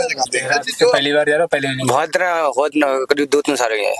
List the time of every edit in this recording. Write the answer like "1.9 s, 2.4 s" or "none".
0.9 s

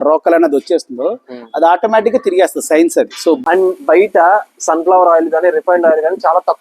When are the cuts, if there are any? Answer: 3.4 s

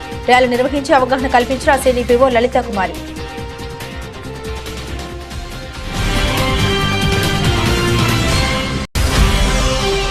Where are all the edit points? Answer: none

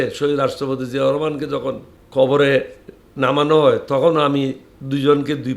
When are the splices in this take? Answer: 1.9 s

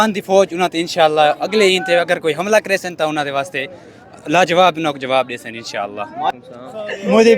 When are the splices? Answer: 6.3 s

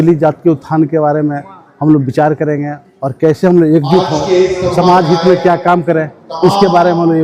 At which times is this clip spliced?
none

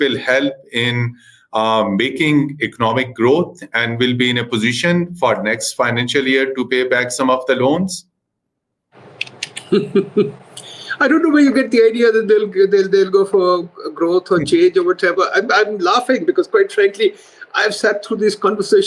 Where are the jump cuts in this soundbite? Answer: none

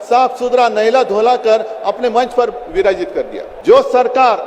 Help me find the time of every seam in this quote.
3.4 s

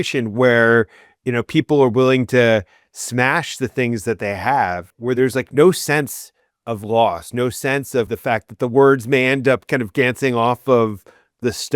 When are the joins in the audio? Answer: 5.2 s, 8.1 s

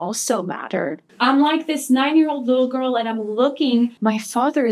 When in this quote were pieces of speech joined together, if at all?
1.0 s, 4.0 s

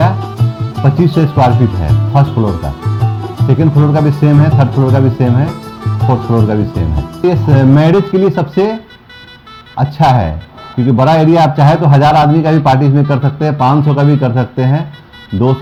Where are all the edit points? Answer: none

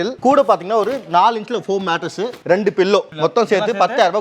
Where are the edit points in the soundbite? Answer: 2.4 s, 3.1 s

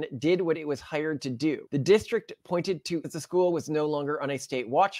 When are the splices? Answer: 1.6 s, 3.1 s

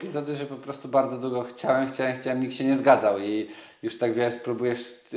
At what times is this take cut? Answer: none

